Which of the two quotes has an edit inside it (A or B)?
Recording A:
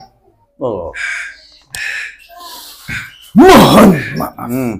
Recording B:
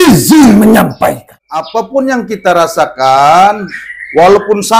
B